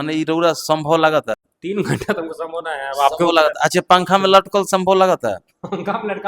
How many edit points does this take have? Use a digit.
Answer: 1